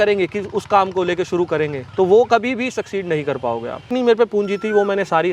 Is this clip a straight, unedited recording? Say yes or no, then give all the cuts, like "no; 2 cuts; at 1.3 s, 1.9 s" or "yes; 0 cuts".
no; 1 cut; at 3.8 s